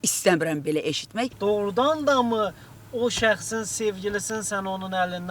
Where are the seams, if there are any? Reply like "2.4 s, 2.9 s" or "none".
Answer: 1.3 s